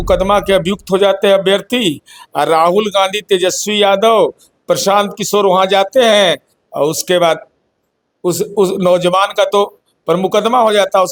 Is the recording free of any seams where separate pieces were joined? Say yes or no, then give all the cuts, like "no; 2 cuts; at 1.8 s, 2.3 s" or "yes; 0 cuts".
yes; 0 cuts